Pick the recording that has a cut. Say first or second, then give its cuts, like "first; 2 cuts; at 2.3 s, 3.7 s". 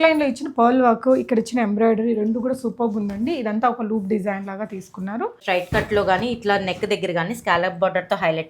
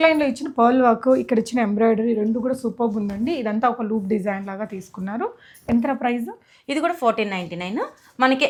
first; 1 cut; at 5.4 s